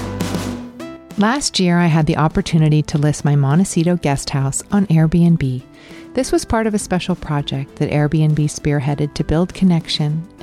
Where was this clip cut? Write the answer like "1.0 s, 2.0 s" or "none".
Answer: 1.0 s